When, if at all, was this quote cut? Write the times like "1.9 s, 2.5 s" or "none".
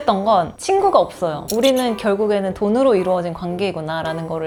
none